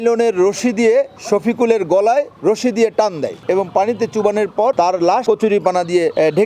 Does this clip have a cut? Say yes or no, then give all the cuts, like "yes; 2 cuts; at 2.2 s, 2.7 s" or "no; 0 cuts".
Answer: yes; 2 cuts; at 3.4 s, 5.0 s